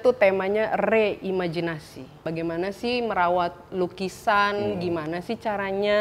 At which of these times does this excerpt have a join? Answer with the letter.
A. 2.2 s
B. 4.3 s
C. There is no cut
A